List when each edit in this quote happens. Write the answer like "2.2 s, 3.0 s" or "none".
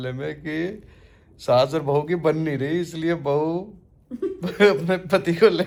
none

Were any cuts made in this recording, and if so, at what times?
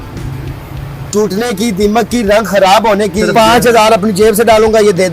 3.3 s

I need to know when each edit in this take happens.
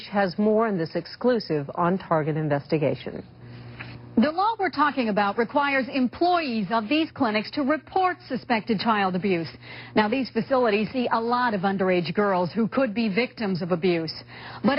4.2 s

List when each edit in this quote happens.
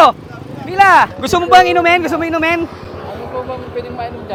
none

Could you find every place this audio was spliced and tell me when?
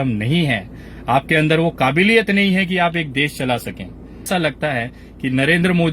4.3 s

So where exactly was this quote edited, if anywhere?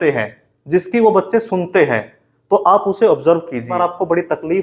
3.7 s

